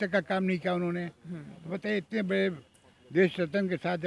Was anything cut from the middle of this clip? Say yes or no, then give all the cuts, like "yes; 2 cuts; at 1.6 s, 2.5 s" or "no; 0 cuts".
no; 0 cuts